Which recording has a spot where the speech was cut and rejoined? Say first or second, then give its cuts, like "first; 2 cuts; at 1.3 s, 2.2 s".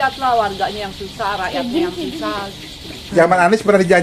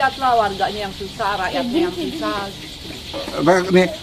first; 1 cut; at 2.9 s